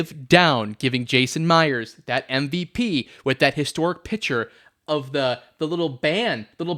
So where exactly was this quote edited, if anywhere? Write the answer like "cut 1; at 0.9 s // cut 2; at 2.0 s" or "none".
none